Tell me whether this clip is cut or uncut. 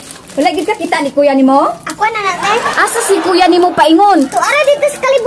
uncut